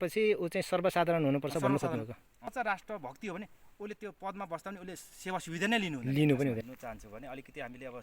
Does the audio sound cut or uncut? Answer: cut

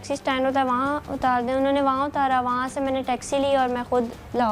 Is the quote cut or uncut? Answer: uncut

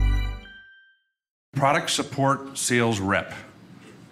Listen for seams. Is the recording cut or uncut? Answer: cut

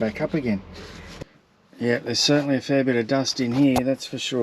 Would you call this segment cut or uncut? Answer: cut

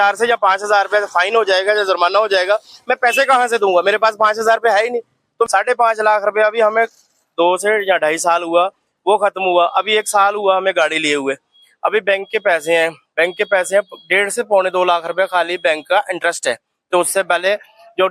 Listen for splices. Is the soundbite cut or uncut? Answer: cut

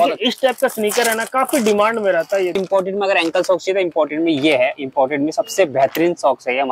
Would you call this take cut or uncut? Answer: cut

